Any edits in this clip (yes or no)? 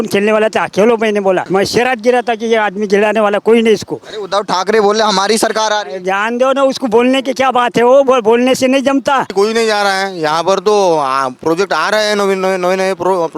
yes